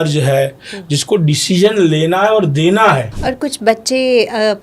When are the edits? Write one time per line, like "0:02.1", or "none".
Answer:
0:03.1